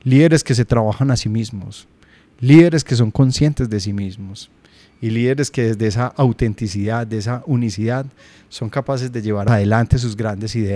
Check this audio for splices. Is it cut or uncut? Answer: cut